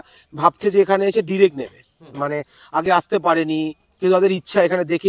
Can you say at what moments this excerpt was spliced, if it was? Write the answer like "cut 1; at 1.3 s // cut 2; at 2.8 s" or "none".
none